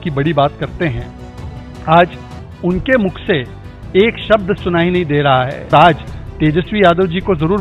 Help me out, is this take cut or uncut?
cut